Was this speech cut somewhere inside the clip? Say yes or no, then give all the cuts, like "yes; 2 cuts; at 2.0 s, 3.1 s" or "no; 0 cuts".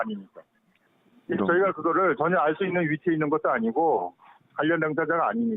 no; 0 cuts